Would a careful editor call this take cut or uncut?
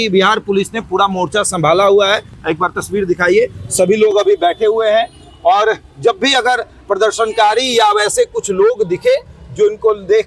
uncut